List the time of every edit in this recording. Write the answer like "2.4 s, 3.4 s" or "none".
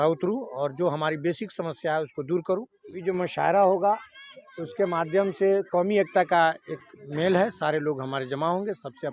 3.0 s